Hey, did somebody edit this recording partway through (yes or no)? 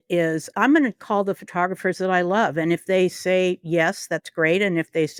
no